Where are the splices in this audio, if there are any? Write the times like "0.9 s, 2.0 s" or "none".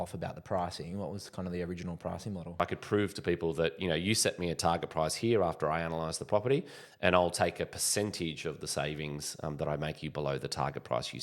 2.6 s

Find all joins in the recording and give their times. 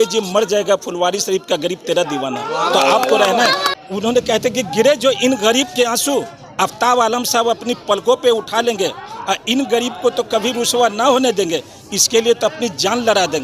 3.7 s

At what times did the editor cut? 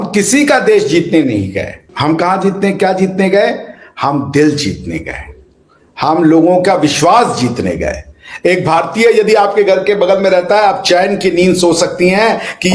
1.8 s

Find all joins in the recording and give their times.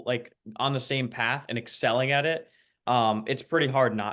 none

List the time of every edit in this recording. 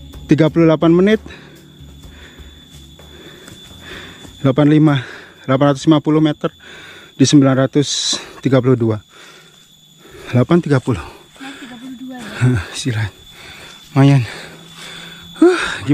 none

